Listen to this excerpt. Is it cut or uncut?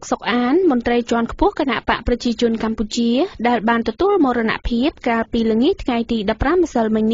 uncut